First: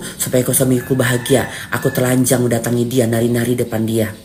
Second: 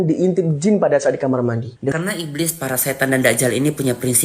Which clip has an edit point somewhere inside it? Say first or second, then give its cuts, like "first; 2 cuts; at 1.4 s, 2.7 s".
second; 1 cut; at 1.9 s